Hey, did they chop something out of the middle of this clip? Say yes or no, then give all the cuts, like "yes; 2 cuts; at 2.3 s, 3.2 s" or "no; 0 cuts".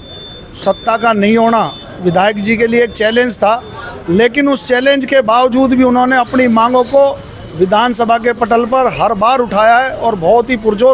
no; 0 cuts